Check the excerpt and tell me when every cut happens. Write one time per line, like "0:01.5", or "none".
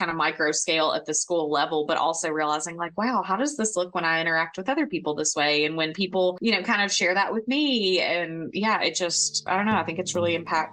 none

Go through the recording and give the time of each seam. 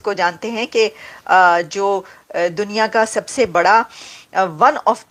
none

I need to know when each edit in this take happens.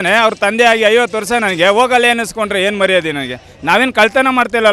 none

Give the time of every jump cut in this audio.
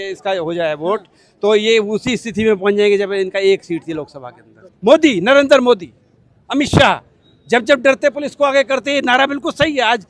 0:04.7

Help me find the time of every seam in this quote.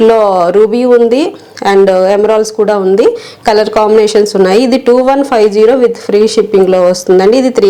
none

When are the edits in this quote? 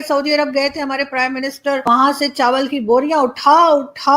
0:01.8

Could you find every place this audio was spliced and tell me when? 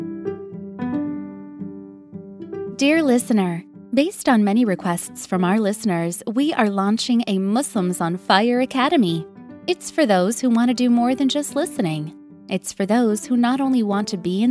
0:02.7

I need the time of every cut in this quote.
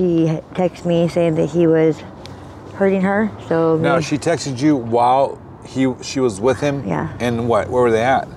none

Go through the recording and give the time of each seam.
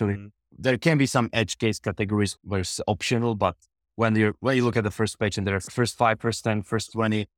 0:02.3
0:05.7

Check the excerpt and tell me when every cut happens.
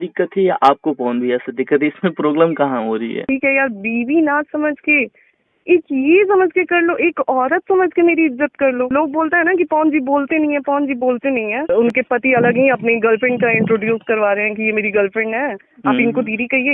0:03.2
0:08.9
0:11.7

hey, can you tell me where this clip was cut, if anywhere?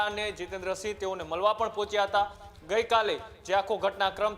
none

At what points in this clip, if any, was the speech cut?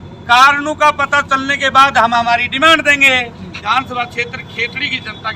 0:03.7

